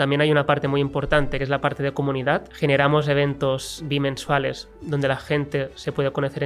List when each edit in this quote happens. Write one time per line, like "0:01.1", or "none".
0:01.4
0:02.5
0:03.8